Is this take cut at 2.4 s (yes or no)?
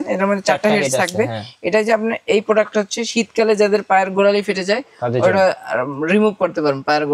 no